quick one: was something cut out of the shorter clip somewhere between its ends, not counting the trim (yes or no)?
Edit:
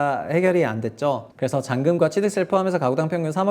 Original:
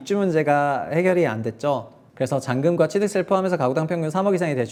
yes